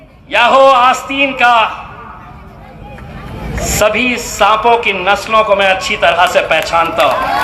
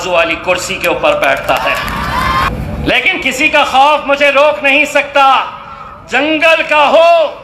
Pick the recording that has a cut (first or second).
second